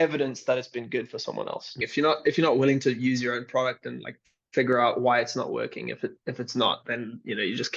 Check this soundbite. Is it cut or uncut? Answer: cut